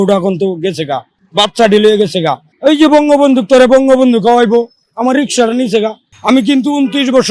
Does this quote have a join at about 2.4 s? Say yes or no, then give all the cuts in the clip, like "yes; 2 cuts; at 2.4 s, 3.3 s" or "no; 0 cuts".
yes; 3 cuts; at 1.2 s, 2.4 s, 6.1 s